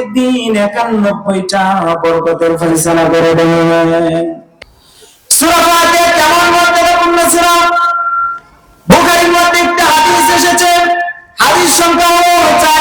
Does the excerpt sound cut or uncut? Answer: cut